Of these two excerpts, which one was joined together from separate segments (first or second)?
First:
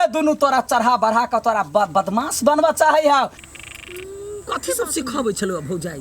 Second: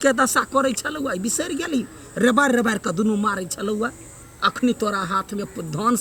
first